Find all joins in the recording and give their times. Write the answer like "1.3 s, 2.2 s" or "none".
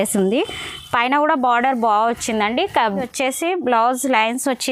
3.1 s